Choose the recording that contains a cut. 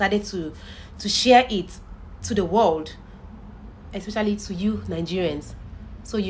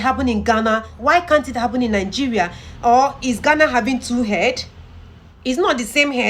second; 2 cuts; at 0.9 s, 5.3 s

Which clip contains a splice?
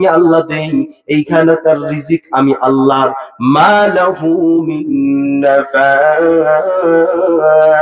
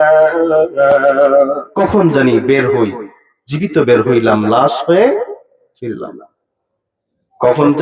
second; 1 cut; at 1.6 s

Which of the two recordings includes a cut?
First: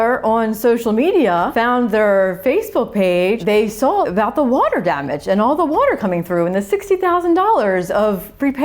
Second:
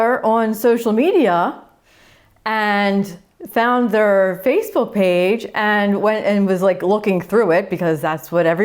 first; 2 cuts; at 1.5 s, 3.7 s

